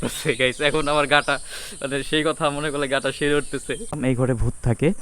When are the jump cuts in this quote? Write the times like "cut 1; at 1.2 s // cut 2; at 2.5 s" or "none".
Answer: cut 1; at 3.9 s